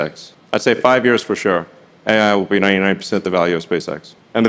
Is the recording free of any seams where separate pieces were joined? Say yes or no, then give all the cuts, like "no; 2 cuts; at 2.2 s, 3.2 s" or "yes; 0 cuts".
yes; 0 cuts